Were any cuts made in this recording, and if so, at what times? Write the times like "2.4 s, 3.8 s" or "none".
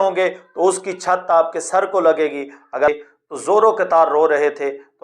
2.9 s

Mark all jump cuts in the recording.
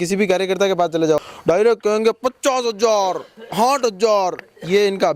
1.2 s

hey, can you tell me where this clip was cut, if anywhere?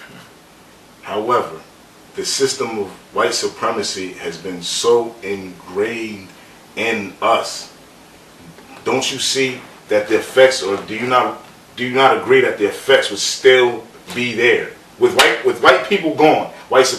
4.7 s

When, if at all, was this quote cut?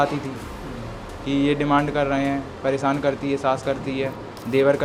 none

